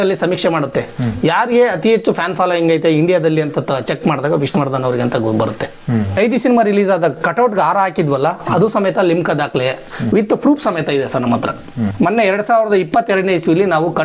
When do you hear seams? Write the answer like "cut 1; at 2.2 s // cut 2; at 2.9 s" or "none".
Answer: cut 1; at 6.1 s // cut 2; at 11.9 s